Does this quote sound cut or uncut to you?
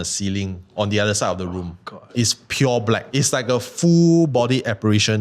cut